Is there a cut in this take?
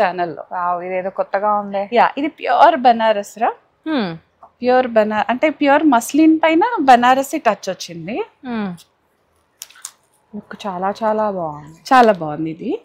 no; 0 cuts

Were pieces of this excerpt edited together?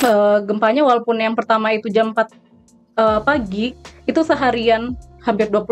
no; 0 cuts

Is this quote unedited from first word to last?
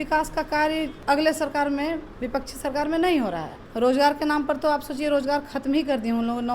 no; 2 cuts; at 0.9 s, 3.6 s

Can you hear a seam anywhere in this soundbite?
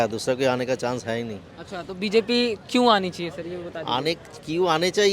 no; 0 cuts

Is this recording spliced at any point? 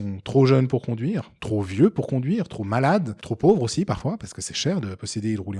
yes; 1 cut; at 3.2 s

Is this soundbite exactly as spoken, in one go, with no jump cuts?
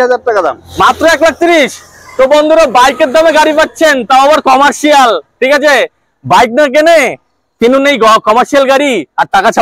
yes; 0 cuts

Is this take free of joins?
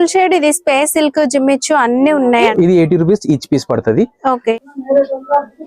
no; 2 cuts; at 2.5 s, 4.6 s

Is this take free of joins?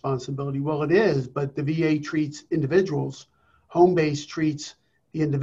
yes; 0 cuts

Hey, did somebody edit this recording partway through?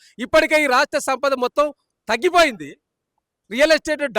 no; 0 cuts

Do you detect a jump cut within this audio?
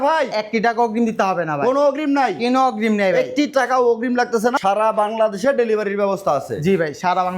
yes; 1 cut; at 4.6 s

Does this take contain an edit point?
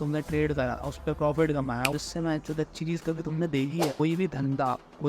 yes; 2 cuts; at 1.9 s, 4.0 s

